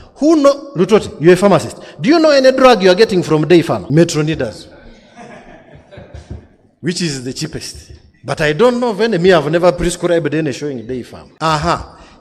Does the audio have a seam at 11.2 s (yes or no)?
yes